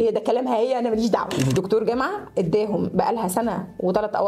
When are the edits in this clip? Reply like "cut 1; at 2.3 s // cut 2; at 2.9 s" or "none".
cut 1; at 1.5 s